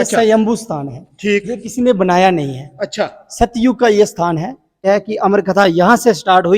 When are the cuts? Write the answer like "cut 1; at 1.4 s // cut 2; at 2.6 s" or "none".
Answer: cut 1; at 4.9 s